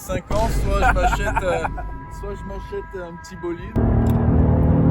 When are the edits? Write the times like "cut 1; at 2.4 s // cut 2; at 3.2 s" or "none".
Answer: cut 1; at 3.8 s

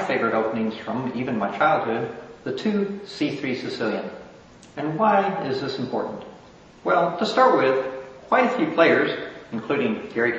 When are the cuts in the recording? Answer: cut 1; at 2.6 s

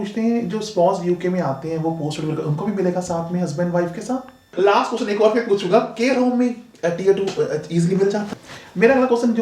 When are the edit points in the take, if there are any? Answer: cut 1; at 4.5 s // cut 2; at 8.3 s

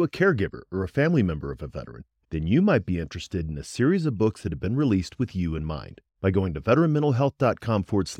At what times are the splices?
none

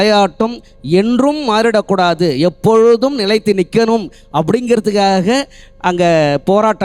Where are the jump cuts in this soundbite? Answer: none

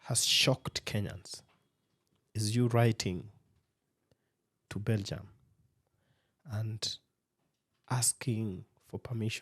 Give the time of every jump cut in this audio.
none

